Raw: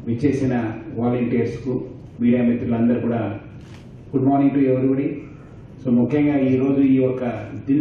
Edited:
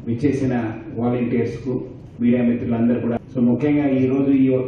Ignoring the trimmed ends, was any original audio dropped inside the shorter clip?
yes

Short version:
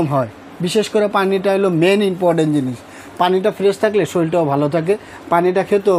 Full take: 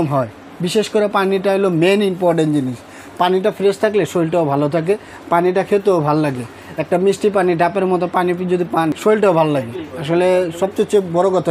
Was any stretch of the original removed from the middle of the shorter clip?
no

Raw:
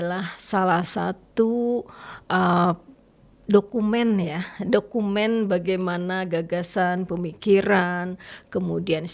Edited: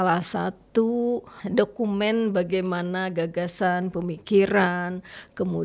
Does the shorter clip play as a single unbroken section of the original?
no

